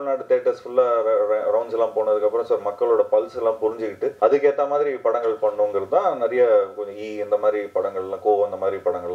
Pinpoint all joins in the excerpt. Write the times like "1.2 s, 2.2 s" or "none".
4.1 s